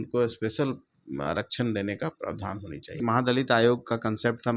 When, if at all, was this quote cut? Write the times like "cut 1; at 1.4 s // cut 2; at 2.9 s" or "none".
cut 1; at 3.0 s